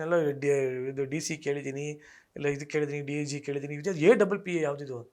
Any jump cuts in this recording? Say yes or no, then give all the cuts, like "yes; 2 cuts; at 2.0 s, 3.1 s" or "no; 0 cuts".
no; 0 cuts